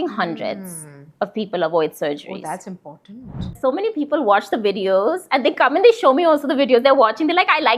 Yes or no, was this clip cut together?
yes